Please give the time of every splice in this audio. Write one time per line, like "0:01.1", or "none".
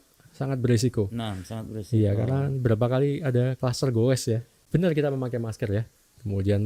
0:04.5